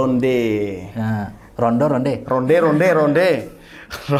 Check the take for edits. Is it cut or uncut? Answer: uncut